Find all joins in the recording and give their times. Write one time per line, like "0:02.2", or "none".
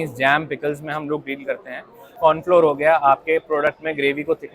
0:02.1